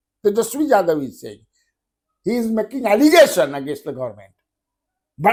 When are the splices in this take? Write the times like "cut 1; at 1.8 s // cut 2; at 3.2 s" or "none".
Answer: none